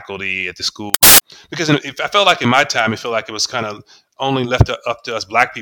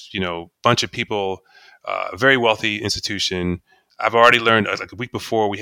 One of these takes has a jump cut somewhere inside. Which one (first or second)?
first